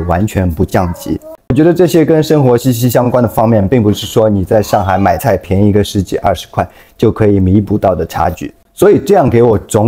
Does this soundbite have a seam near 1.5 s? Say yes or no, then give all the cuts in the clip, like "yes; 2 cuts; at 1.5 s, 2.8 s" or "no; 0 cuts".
yes; 1 cut; at 1.5 s